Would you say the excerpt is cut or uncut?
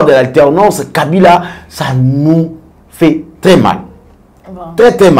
uncut